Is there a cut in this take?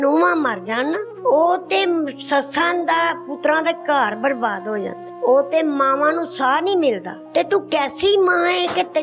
yes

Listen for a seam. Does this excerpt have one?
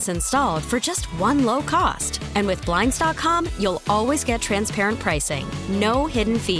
no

